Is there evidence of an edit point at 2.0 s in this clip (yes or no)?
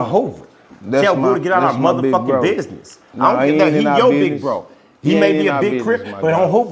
no